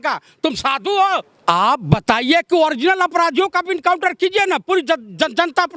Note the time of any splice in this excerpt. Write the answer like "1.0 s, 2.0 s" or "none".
1.3 s